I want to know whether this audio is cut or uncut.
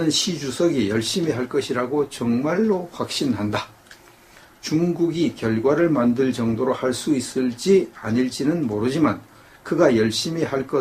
cut